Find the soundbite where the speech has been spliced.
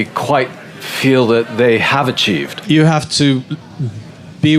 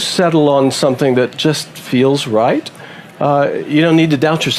first; 1 cut; at 2.5 s

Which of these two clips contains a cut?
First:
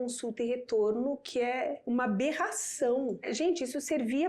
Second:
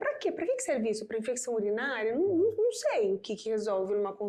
first; 2 cuts; at 1.8 s, 3.3 s

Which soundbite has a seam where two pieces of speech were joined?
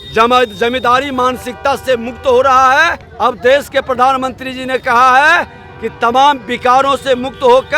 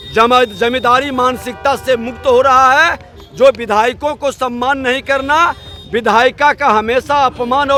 first; 1 cut; at 3.0 s

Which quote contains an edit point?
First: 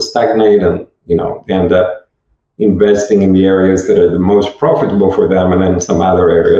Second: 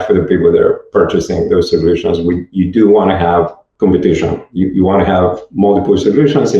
second; 1 cut; at 3.6 s

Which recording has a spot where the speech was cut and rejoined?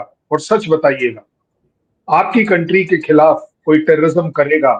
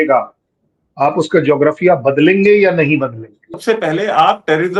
second; 1 cut; at 3.5 s

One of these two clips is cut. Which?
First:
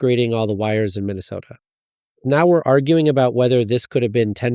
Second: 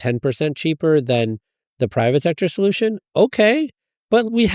first; 1 cut; at 2.2 s

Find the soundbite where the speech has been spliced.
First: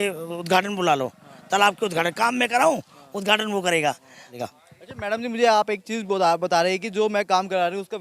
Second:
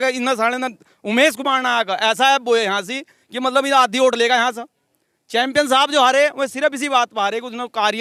first; 1 cut; at 4.3 s

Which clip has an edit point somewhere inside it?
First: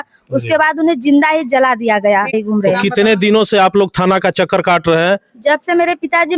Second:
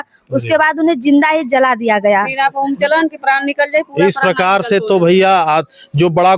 first; 1 cut; at 2.3 s

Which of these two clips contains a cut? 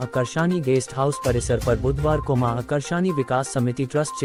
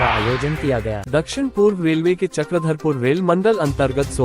second; 1 cut; at 1.0 s

